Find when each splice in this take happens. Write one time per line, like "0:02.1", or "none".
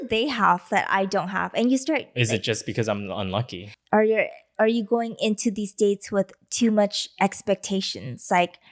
0:03.7